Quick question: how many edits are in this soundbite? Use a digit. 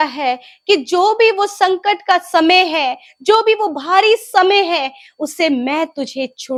0